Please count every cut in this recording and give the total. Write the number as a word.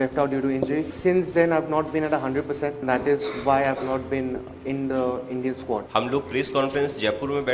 three